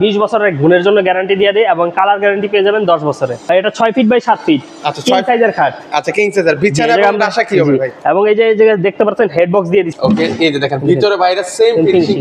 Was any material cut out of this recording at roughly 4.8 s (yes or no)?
no